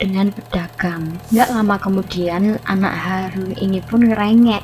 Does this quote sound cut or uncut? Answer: uncut